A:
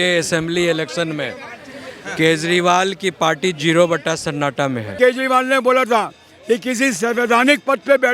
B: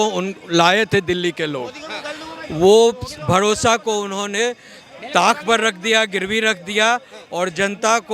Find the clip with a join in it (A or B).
A